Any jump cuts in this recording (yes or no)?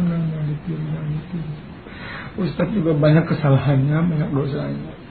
no